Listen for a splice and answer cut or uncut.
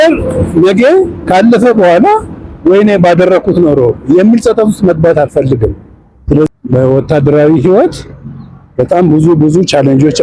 cut